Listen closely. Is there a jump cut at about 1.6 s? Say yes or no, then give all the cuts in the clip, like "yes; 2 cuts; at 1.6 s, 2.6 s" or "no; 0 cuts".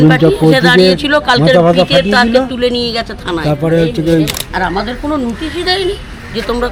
no; 1 cut; at 4.4 s